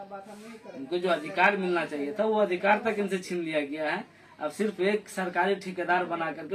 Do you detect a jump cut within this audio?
no; 0 cuts

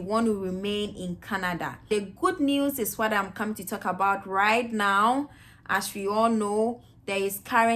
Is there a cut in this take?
yes; 1 cut; at 1.9 s

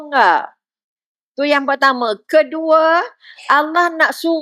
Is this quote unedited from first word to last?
yes; 0 cuts

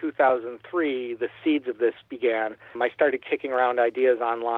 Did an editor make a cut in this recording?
yes; 1 cut; at 2.7 s

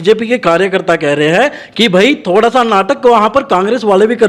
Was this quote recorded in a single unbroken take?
yes; 0 cuts

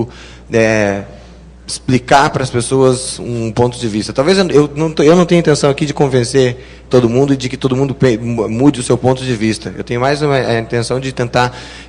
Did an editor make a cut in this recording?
no; 0 cuts

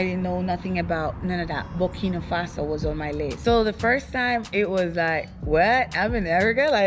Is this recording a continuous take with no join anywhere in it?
no; 1 cut; at 3.4 s

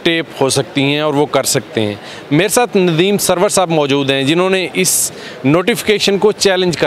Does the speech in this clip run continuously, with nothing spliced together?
yes; 0 cuts

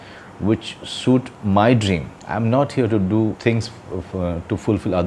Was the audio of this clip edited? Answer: yes; 3 cuts; at 1.3 s, 2.2 s, 3.4 s

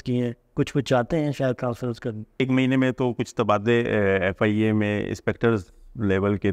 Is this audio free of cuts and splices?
no; 1 cut; at 2.4 s

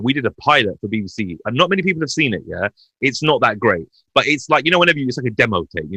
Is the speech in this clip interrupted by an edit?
no; 0 cuts

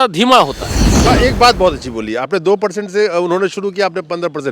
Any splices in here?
yes; 1 cut; at 1.0 s

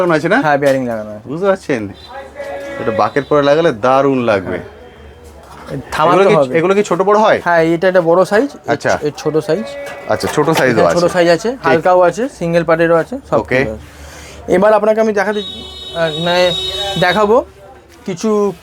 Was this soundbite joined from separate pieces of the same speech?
no; 0 cuts

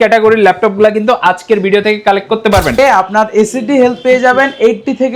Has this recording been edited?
yes; 1 cut; at 2.7 s

